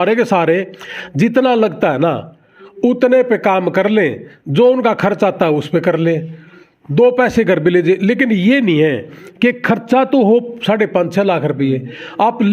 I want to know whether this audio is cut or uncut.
uncut